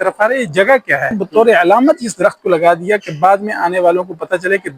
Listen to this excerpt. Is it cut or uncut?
cut